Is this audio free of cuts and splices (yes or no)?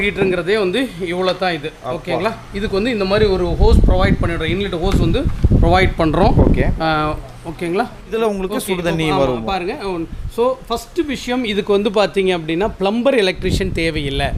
yes